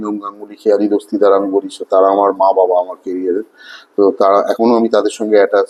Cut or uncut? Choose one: uncut